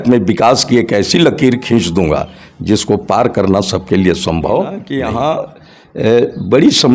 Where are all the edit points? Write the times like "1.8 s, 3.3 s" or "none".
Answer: 4.9 s